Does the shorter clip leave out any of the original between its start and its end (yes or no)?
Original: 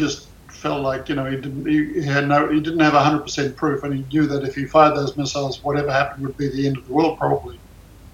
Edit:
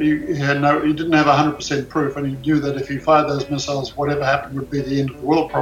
no